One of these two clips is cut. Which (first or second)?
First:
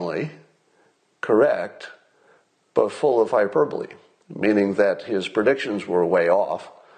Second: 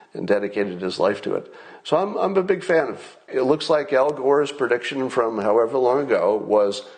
second